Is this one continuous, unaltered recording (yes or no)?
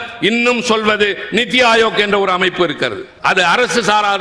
no